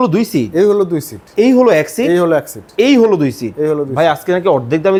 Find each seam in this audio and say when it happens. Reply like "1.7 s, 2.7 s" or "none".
none